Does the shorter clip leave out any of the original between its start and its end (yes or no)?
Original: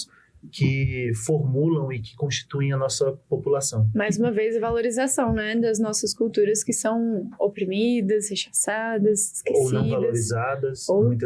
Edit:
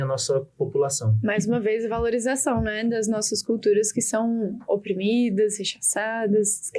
no